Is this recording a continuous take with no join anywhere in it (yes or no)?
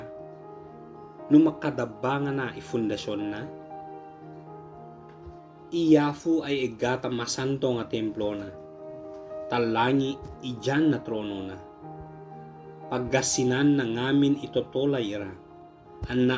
yes